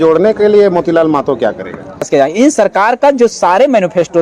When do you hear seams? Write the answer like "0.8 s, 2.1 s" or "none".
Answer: 2.1 s